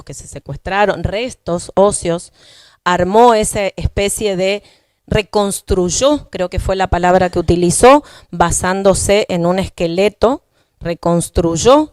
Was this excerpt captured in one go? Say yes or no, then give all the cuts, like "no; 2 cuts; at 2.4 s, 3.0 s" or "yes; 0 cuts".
yes; 0 cuts